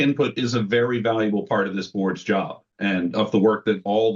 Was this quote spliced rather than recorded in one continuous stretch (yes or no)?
no